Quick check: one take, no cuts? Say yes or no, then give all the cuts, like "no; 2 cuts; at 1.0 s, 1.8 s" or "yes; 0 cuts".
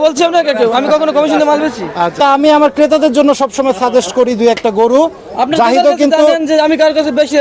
no; 1 cut; at 2.2 s